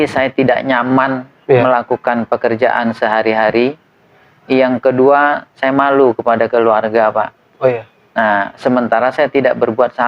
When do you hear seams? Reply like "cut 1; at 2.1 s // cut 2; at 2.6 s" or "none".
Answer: none